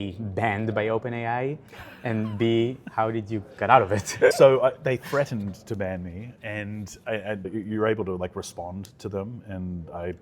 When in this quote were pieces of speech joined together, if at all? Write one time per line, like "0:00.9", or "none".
0:04.3
0:06.3
0:07.5

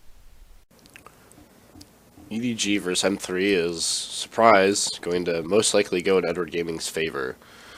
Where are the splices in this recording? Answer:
none

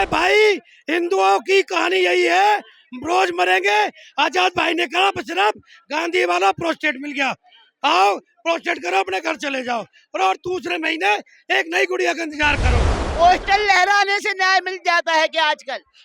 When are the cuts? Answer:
0:13.0

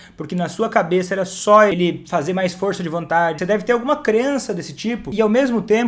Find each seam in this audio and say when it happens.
0:01.7
0:03.4
0:05.1

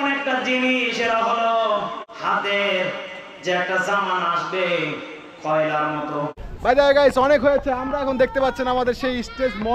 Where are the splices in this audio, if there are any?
0:02.1
0:06.5

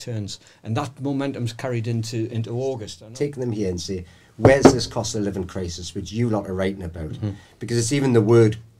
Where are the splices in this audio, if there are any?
0:03.0

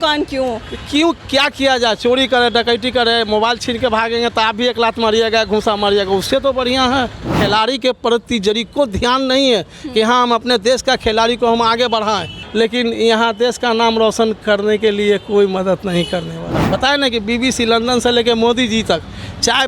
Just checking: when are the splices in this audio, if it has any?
0:07.4
0:12.4
0:16.6

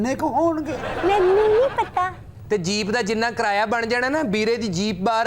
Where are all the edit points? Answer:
0:02.3

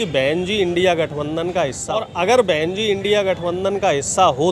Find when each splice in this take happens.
0:02.1

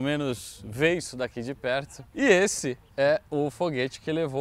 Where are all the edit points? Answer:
0:02.0

